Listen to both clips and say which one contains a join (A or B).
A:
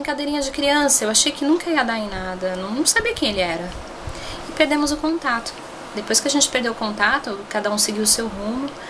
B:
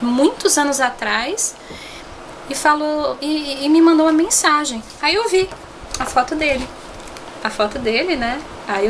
A